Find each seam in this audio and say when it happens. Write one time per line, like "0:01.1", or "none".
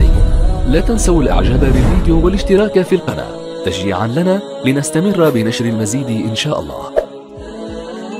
0:07.1